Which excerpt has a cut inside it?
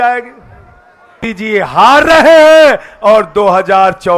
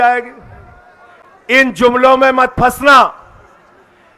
first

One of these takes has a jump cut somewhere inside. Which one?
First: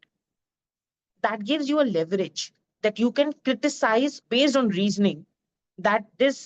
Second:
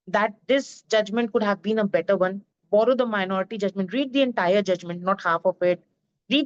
first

